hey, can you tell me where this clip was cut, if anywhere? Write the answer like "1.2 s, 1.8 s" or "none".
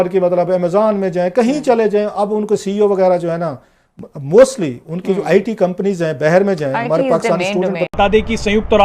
7.9 s